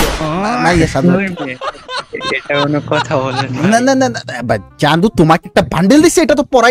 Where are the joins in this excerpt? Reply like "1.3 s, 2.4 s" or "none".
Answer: none